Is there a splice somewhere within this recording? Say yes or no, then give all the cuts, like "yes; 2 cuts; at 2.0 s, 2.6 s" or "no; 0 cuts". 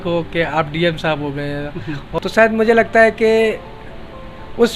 yes; 1 cut; at 2.2 s